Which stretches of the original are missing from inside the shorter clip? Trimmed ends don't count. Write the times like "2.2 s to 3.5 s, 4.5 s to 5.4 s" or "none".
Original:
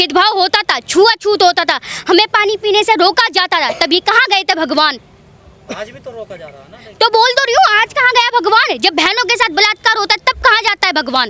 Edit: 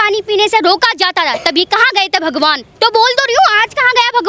5.0 s to 6.8 s